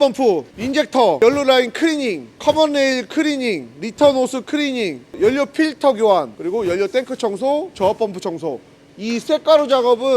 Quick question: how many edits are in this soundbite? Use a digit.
2